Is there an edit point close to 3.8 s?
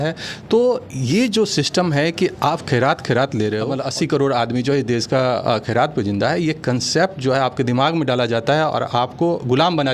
yes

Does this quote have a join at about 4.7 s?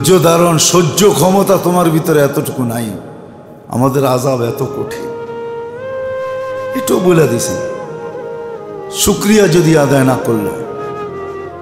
no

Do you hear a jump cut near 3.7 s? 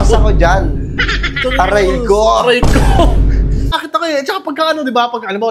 yes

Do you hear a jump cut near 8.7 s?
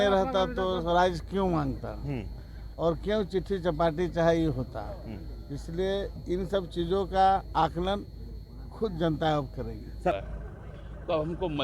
no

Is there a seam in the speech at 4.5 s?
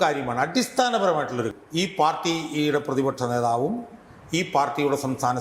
no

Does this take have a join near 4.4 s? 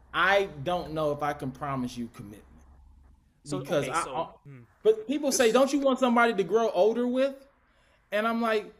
yes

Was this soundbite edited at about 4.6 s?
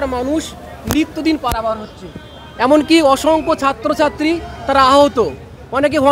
no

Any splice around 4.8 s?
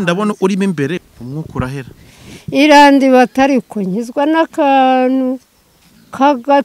no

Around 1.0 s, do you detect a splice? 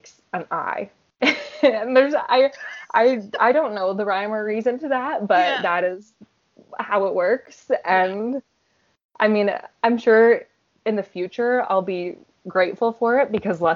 yes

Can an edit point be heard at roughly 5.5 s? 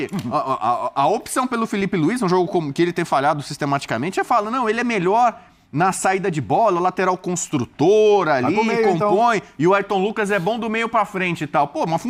no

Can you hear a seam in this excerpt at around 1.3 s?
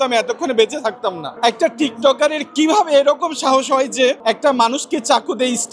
yes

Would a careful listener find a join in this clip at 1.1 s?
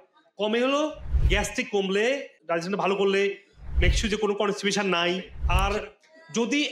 no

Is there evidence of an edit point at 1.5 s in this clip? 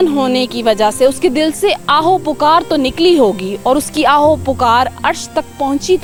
no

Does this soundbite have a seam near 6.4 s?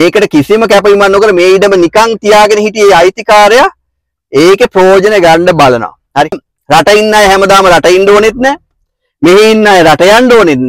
yes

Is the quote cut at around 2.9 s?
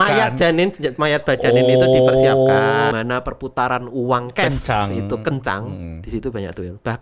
yes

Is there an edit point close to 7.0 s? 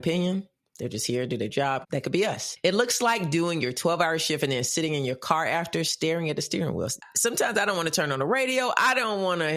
yes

